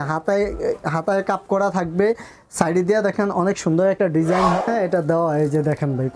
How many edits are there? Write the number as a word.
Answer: one